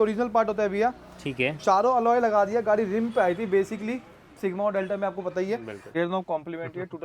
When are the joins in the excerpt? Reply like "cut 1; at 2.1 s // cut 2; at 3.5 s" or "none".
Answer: cut 1; at 5.8 s